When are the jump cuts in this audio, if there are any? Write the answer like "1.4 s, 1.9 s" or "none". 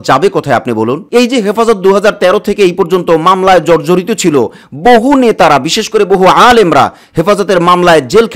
1.0 s

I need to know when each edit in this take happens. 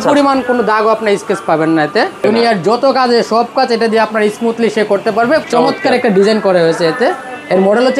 2.2 s, 5.4 s

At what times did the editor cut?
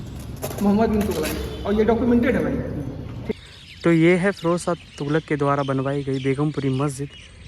3.3 s

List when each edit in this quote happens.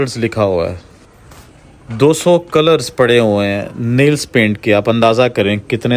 none

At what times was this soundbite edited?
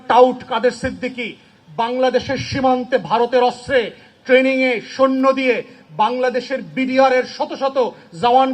none

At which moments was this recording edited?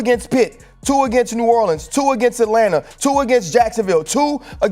none

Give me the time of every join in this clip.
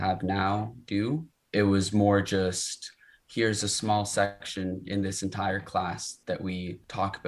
1.4 s, 6.4 s

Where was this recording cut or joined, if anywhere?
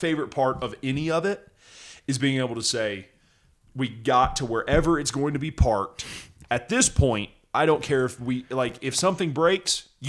none

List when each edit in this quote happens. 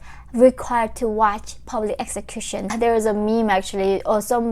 2.7 s

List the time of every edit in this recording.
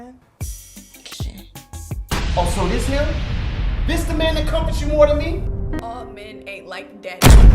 1.1 s, 5.8 s

